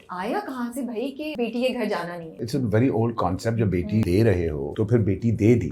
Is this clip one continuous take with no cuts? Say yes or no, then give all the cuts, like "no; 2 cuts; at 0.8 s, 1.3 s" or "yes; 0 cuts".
no; 3 cuts; at 1.3 s, 2.4 s, 4.2 s